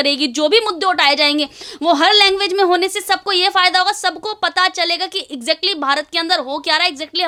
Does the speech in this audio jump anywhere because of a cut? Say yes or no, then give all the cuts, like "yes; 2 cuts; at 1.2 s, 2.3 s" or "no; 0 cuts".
no; 0 cuts